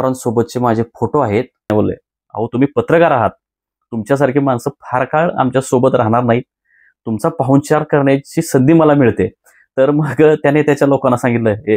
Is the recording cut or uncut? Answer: cut